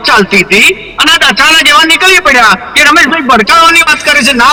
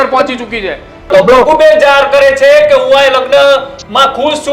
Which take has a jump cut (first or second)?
second